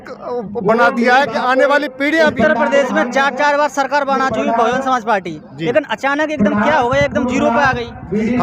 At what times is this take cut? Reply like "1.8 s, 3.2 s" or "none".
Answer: 2.3 s